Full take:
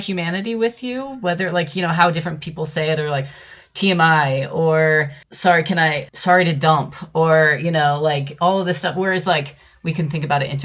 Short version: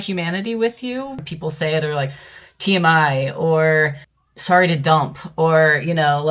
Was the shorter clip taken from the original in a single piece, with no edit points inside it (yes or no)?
no